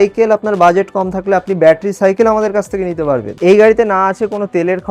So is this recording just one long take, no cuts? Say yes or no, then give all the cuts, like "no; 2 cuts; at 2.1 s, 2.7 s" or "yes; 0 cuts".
no; 1 cut; at 3.3 s